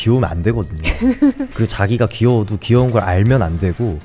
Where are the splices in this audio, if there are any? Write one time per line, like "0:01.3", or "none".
0:01.5

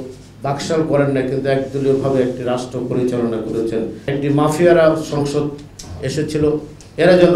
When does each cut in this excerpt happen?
0:04.0

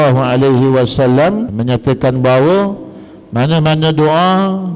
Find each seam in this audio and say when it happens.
0:01.5

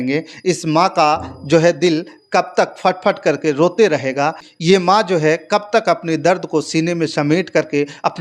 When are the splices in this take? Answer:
none

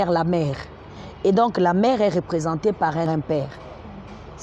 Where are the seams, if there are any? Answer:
0:03.1

